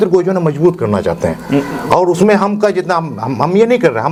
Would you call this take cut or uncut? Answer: uncut